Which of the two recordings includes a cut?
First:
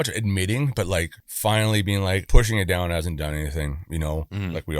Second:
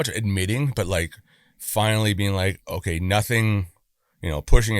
first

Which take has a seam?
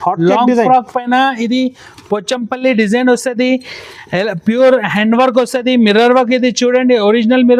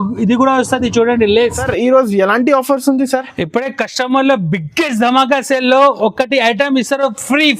second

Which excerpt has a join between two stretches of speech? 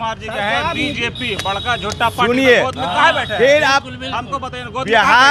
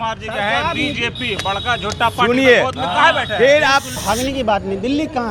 second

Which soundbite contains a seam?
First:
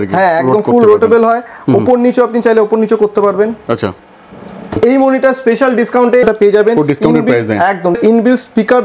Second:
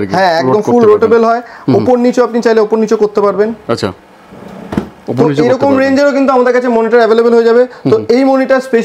first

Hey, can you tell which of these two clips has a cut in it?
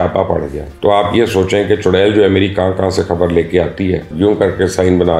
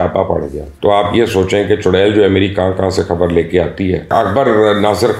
first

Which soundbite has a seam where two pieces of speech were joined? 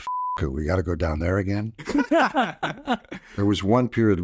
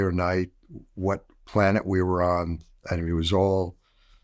first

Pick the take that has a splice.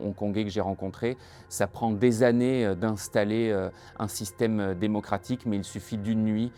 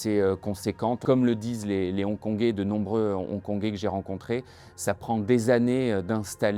second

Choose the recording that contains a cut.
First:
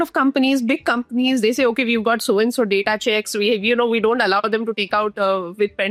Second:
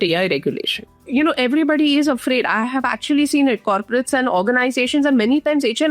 second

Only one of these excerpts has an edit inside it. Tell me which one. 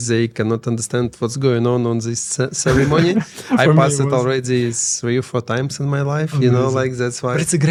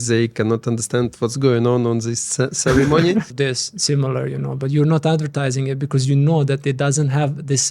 second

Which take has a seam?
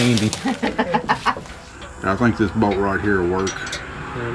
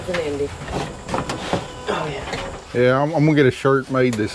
first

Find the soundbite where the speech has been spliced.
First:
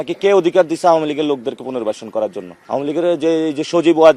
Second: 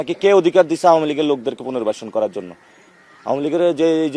first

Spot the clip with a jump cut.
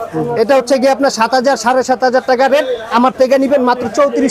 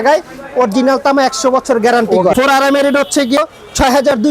second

